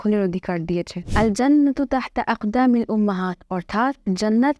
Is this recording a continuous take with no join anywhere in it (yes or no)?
no